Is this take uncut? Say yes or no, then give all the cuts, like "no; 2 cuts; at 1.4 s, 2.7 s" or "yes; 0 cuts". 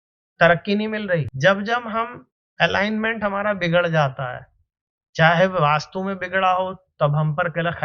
no; 1 cut; at 1.3 s